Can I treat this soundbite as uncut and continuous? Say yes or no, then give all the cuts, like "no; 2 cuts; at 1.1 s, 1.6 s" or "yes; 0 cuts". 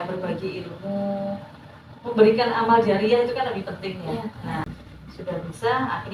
no; 1 cut; at 4.7 s